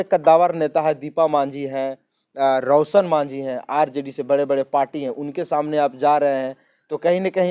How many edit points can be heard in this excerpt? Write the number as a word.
zero